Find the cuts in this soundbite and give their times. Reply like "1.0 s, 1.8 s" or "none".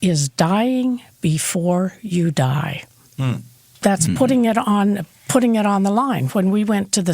3.7 s